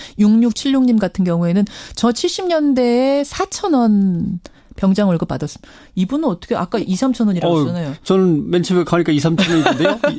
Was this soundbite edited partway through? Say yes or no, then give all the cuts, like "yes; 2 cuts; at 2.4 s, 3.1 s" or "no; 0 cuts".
yes; 1 cut; at 7.3 s